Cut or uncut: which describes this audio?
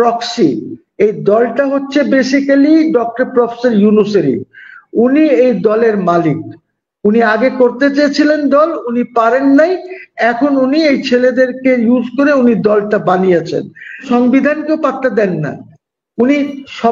cut